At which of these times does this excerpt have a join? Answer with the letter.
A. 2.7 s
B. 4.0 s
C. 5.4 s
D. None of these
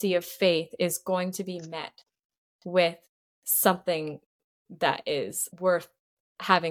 C